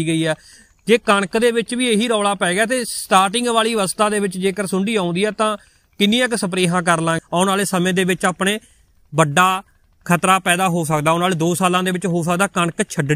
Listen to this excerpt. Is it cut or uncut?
cut